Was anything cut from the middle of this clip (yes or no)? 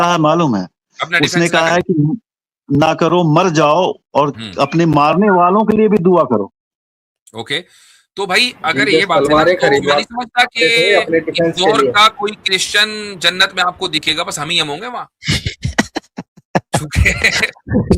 no